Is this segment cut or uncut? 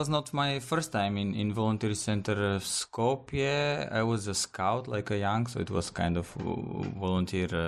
uncut